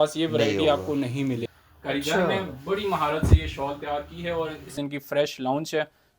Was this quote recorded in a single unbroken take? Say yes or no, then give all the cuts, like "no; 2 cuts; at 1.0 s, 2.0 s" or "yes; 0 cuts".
no; 2 cuts; at 1.4 s, 4.7 s